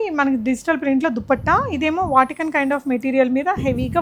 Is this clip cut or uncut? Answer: uncut